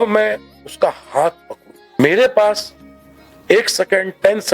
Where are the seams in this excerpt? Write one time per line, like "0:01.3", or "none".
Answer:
0:02.0